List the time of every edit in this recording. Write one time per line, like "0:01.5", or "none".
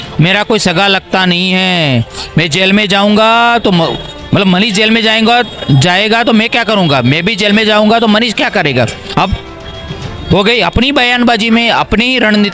none